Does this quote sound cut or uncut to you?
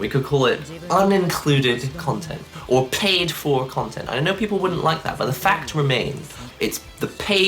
cut